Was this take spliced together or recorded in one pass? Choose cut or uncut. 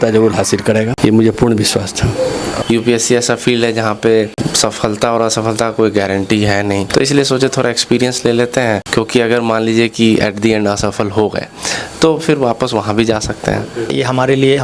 cut